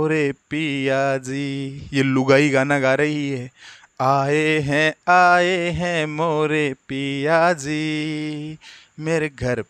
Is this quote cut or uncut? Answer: uncut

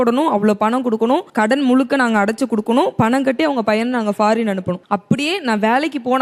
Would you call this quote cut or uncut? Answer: uncut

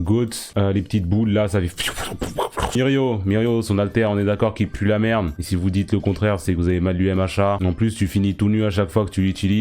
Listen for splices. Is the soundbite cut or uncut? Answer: cut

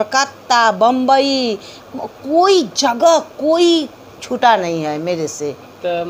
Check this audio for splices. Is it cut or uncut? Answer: uncut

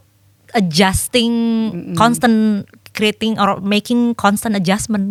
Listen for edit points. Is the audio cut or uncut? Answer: uncut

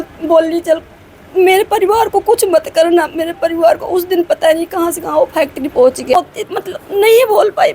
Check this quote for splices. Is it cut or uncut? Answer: cut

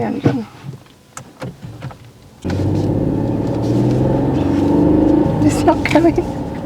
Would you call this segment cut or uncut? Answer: cut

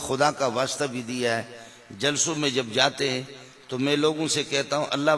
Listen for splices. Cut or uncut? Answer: uncut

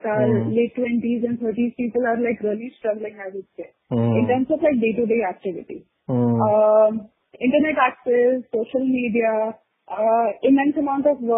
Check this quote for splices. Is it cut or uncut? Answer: uncut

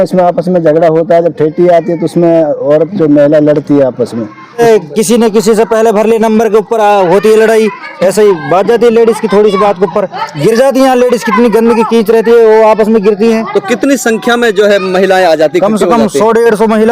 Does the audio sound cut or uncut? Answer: cut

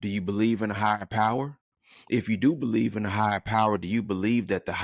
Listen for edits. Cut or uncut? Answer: uncut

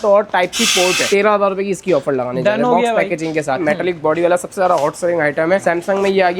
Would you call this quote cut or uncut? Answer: cut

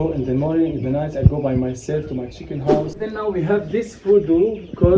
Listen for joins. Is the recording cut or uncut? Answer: cut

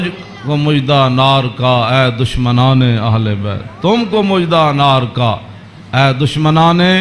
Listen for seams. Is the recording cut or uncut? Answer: uncut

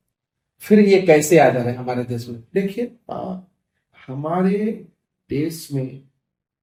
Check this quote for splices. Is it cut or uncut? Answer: uncut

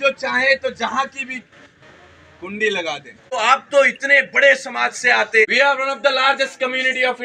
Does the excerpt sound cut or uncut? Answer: cut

